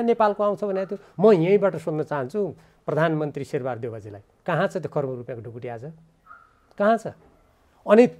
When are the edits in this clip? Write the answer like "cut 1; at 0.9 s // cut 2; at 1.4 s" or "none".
none